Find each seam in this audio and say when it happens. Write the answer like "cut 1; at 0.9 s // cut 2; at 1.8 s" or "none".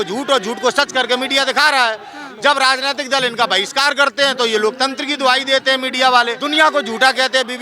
cut 1; at 6.4 s